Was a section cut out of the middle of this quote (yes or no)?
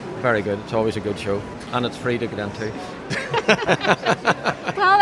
yes